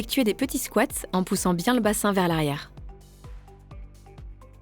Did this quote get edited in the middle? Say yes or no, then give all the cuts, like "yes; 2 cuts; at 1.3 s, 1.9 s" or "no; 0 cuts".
yes; 1 cut; at 2.7 s